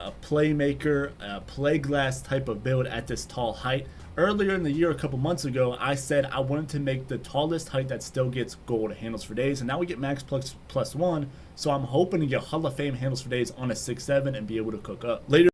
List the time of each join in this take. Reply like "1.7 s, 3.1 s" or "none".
none